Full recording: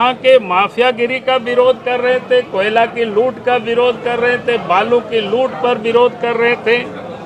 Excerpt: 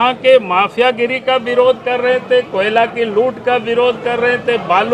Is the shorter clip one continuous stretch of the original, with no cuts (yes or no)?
yes